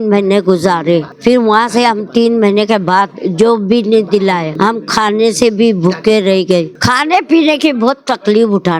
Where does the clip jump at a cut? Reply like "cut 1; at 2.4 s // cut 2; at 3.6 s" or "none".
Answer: cut 1; at 1.1 s // cut 2; at 4.5 s // cut 3; at 6.7 s